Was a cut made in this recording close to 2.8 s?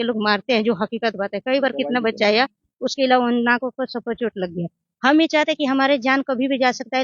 no; 0 cuts

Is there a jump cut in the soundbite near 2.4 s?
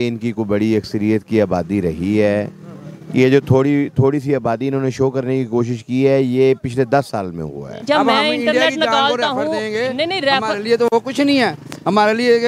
no; 1 cut; at 7.8 s

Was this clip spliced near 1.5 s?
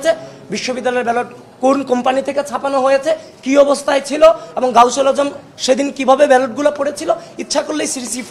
no; 0 cuts

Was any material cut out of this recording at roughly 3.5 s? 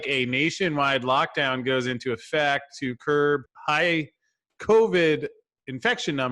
yes; 1 cut; at 3.5 s

